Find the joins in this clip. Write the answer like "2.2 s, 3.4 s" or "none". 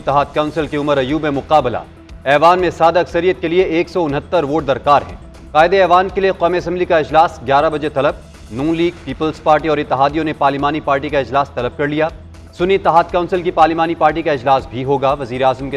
none